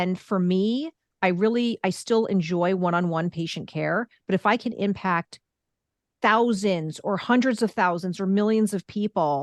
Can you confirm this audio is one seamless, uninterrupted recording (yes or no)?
yes